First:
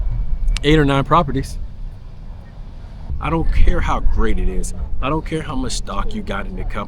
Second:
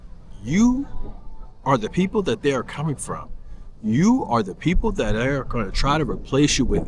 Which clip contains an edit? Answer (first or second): first